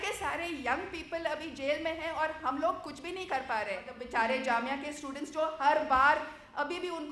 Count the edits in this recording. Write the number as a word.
one